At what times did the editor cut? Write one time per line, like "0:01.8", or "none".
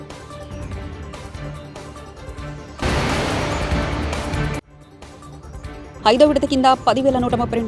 0:02.8
0:04.7